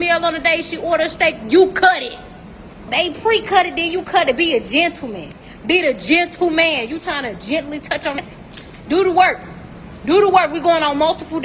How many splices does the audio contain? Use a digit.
2